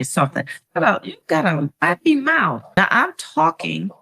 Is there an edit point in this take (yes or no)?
yes